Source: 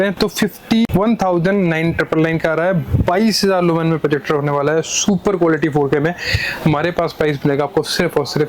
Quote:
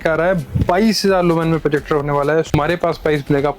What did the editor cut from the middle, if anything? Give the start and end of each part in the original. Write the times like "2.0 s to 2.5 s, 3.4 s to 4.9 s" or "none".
4.9 s to 6.7 s